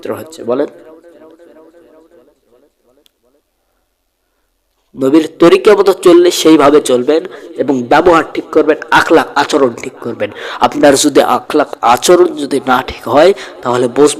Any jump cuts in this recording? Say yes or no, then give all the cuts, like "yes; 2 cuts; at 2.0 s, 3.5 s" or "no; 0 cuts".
no; 0 cuts